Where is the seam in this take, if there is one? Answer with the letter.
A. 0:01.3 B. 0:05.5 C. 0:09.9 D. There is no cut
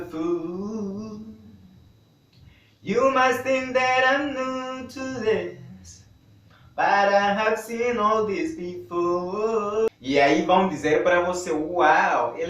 C